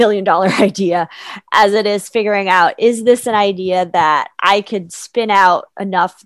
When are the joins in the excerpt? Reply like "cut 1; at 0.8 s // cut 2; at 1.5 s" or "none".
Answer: none